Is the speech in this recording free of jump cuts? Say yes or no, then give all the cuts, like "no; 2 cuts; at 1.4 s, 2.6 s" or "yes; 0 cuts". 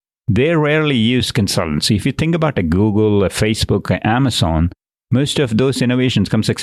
yes; 0 cuts